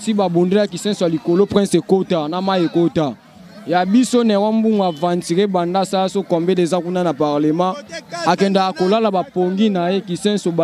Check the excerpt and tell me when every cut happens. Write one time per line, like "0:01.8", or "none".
none